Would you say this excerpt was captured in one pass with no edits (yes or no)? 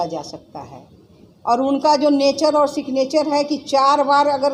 yes